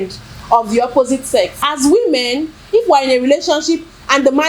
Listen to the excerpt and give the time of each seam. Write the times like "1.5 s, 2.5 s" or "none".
1.6 s

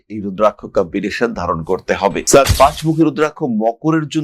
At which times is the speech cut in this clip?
2.5 s

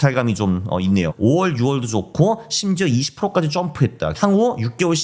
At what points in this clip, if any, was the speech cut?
1.1 s, 4.2 s

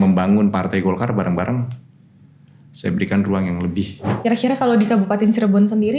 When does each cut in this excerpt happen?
4.1 s

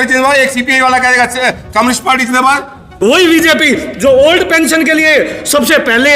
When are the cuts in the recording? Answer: 2.9 s

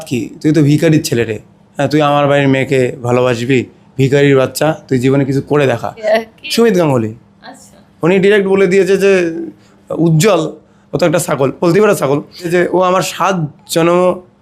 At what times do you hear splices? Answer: 6.0 s, 12.5 s

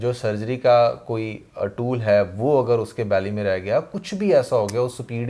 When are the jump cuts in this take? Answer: none

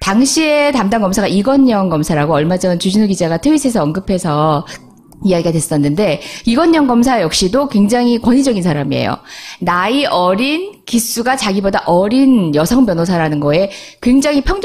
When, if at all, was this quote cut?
none

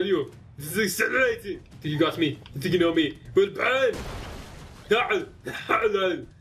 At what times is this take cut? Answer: 1.7 s

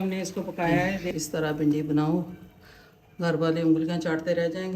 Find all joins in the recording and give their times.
1.1 s

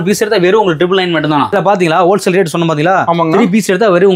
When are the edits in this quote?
1.5 s

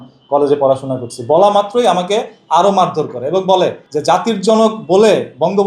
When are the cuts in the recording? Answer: 3.9 s

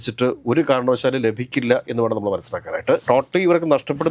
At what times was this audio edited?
3.0 s

